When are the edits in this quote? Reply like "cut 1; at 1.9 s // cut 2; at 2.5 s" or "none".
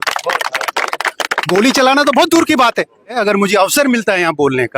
cut 1; at 3.1 s